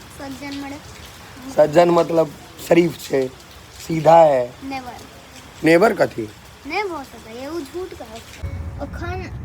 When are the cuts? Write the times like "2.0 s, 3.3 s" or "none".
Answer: 8.4 s

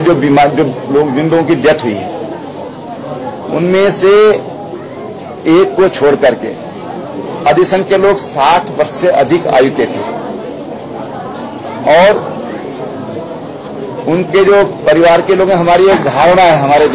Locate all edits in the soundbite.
none

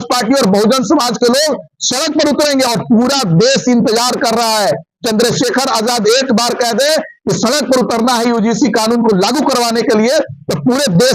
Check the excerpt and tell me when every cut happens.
none

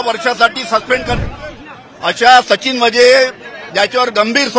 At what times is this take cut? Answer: 1.2 s

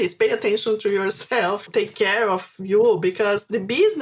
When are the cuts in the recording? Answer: 1.6 s

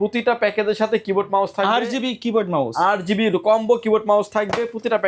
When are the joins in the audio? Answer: none

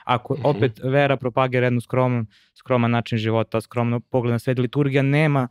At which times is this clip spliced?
none

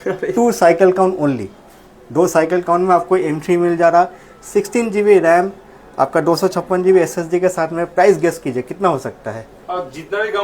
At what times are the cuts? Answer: none

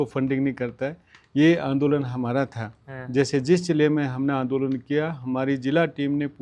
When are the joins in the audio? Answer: none

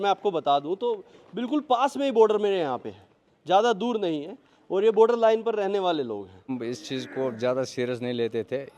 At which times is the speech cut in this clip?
6.5 s

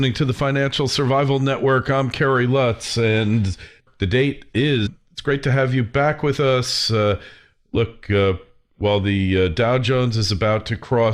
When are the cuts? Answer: none

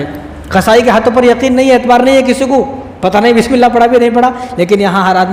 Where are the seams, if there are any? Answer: none

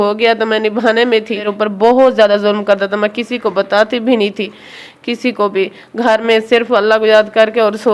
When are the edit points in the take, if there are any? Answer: 1.3 s

